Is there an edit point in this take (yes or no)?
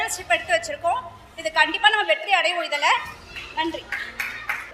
no